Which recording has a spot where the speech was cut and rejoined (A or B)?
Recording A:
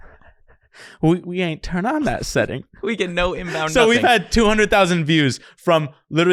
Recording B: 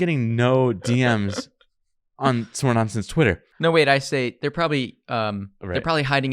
B